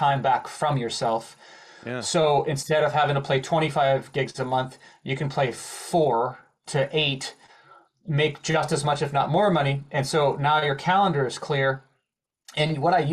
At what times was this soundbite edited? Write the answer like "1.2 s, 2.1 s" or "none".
none